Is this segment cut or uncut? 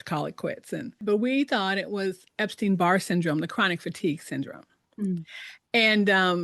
cut